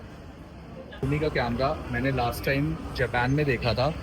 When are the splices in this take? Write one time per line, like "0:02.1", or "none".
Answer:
0:01.1